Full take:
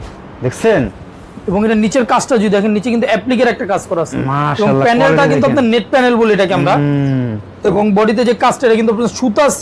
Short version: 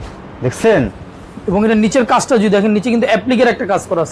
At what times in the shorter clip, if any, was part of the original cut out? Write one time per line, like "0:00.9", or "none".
none